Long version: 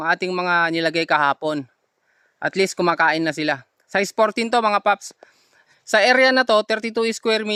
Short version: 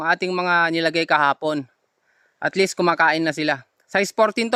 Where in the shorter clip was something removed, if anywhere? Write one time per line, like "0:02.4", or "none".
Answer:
none